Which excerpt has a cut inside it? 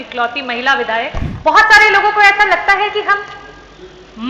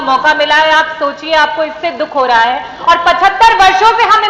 first; 1 cut; at 1.2 s

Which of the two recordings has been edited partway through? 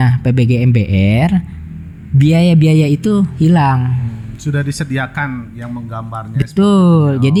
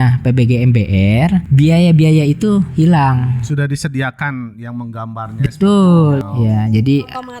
second; 3 cuts; at 1.5 s, 3.4 s, 6.2 s

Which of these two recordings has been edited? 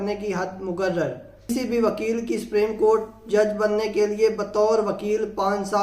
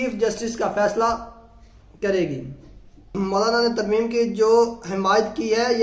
first; 1 cut; at 1.5 s

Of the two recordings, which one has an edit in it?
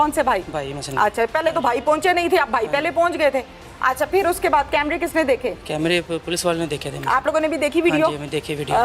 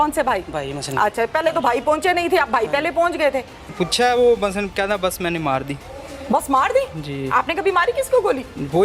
second; 1 cut; at 3.6 s

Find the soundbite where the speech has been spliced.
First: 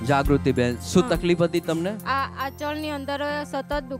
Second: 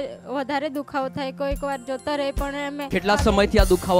second; 1 cut; at 2.9 s

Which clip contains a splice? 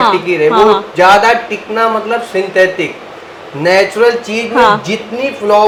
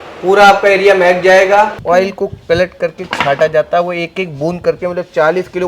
second; 1 cut; at 1.8 s

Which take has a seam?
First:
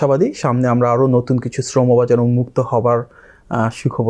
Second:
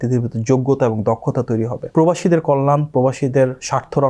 second; 1 cut; at 1.8 s

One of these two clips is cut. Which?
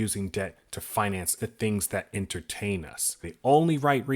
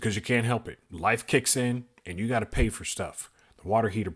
first; 2 cuts; at 1.4 s, 3.2 s

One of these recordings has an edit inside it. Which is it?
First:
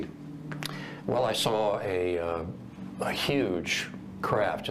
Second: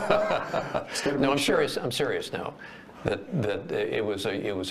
first; 1 cut; at 3.7 s

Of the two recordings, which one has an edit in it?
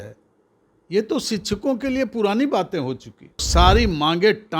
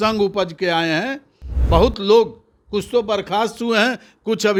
first; 1 cut; at 3.5 s

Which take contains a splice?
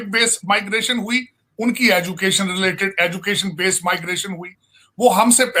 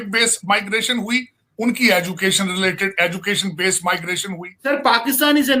second; 1 cut; at 4.6 s

